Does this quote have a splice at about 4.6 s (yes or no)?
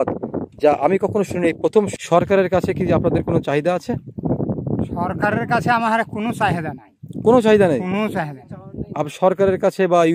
no